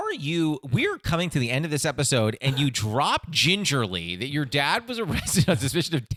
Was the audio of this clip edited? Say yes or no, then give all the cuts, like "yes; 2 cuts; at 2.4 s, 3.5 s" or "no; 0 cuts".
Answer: no; 0 cuts